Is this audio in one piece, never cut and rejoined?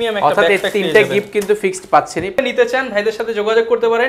no; 1 cut; at 2.4 s

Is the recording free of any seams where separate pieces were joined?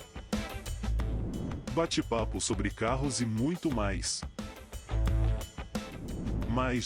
yes; 0 cuts

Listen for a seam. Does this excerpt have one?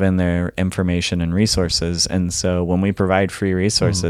no; 0 cuts

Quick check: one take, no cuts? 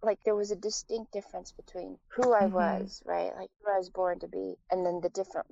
no; 3 cuts; at 2.0 s, 3.5 s, 4.6 s

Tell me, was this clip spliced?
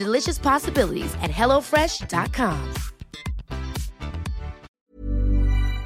yes; 1 cut; at 4.6 s

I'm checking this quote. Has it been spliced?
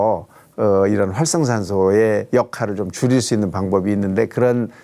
no; 0 cuts

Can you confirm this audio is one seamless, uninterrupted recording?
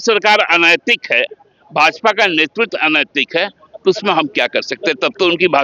yes; 0 cuts

